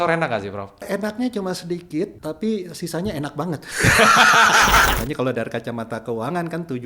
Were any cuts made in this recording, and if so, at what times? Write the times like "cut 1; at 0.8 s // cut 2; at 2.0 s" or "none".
cut 1; at 0.8 s // cut 2; at 2.2 s // cut 3; at 4.9 s